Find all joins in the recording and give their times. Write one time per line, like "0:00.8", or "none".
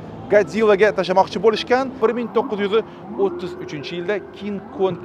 0:02.0